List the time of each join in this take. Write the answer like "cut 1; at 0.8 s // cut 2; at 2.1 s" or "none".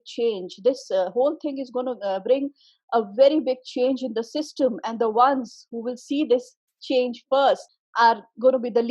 cut 1; at 7.8 s